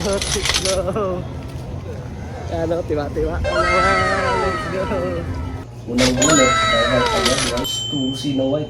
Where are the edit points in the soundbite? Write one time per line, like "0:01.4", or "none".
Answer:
0:05.7
0:07.8